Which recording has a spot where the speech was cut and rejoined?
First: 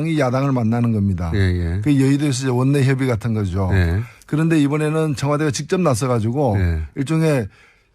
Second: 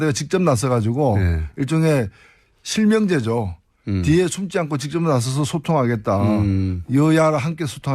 first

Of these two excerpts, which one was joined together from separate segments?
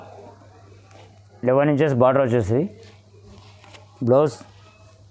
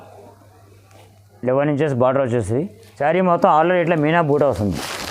second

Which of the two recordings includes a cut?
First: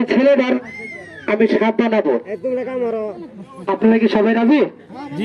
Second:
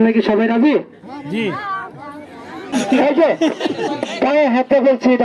second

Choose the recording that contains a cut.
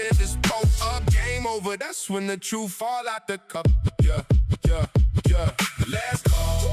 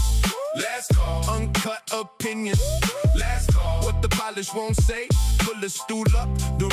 first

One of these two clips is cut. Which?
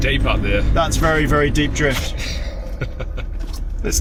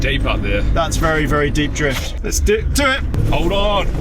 second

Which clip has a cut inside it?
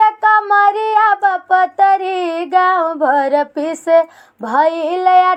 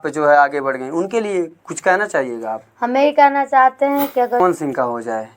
second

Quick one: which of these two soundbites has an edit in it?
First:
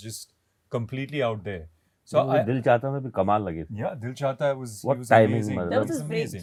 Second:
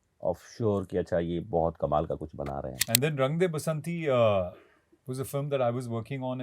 second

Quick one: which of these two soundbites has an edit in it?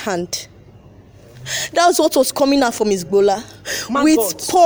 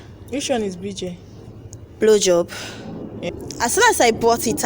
second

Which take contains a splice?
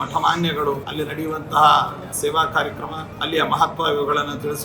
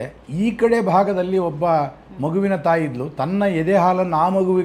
first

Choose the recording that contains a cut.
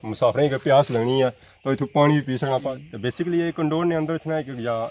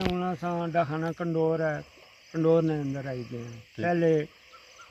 first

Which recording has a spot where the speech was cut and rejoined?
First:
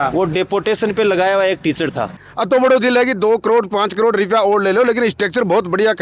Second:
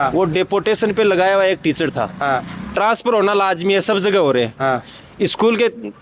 first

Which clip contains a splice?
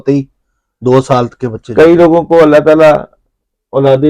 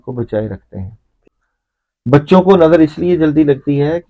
second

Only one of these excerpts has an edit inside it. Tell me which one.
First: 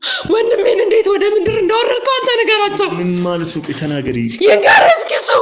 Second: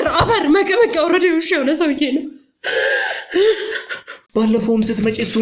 second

